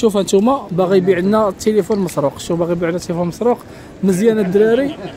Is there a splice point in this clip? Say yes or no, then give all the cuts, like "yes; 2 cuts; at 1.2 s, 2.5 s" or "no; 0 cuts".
no; 0 cuts